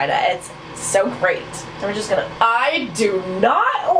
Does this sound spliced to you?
yes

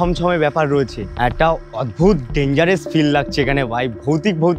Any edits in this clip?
yes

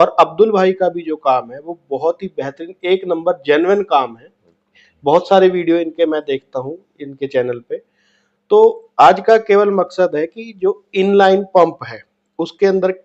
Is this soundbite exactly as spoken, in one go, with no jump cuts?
yes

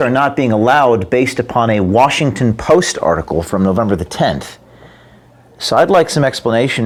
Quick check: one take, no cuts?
yes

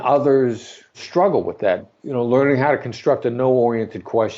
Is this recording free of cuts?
no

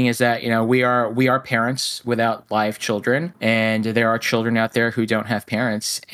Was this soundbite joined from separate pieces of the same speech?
yes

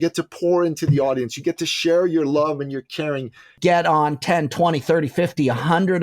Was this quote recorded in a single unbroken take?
no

